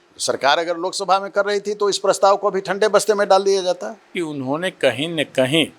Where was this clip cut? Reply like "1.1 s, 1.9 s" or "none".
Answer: 4.1 s